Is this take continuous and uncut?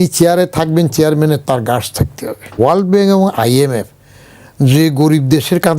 no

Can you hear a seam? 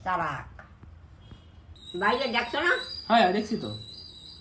yes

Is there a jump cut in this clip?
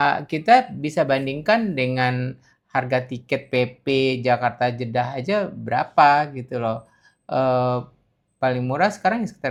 no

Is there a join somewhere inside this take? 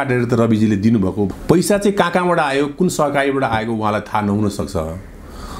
yes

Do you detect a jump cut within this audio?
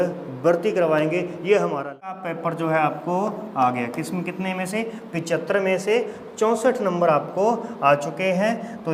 yes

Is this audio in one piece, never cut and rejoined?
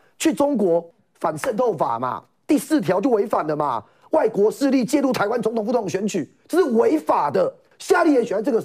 no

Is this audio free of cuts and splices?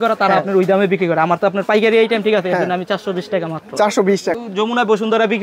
no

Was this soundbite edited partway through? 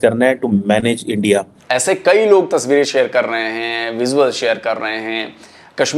yes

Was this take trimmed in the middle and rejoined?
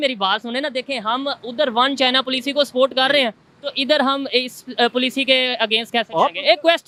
no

